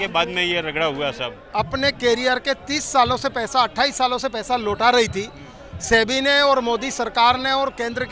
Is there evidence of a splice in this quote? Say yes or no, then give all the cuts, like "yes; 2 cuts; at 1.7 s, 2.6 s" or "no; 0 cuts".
yes; 1 cut; at 1.3 s